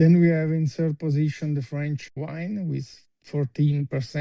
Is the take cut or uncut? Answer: cut